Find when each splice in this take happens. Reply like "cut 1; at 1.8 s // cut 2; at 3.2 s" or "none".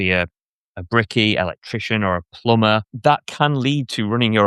cut 1; at 2.9 s